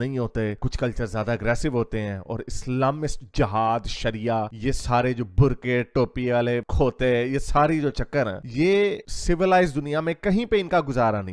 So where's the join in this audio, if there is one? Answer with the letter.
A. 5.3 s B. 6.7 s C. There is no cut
C